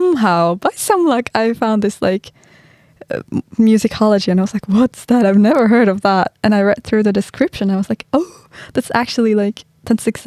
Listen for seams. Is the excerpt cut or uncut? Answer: uncut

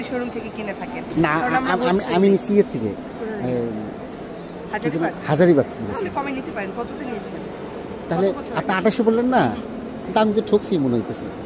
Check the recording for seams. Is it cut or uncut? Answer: uncut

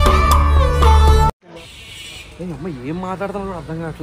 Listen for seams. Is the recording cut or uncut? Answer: uncut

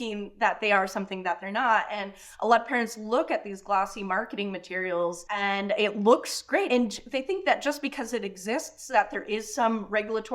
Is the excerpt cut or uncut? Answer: cut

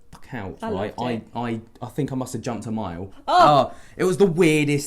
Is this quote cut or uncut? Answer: cut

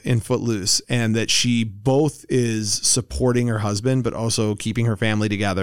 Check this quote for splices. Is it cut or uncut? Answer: uncut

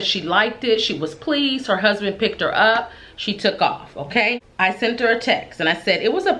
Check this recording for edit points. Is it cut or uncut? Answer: cut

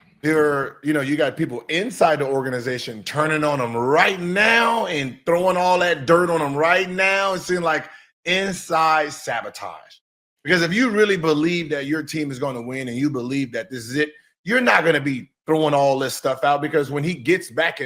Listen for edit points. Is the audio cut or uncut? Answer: uncut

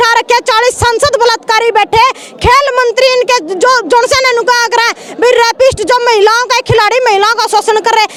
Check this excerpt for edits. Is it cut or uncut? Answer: uncut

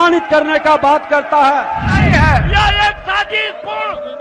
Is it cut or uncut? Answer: cut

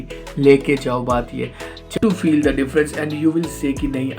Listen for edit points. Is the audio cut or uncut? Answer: cut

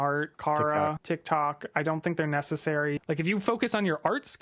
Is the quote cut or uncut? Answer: cut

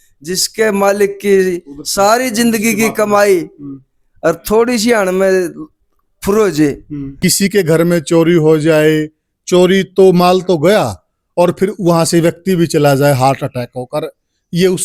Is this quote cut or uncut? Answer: cut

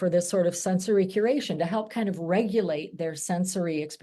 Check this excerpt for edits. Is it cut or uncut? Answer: uncut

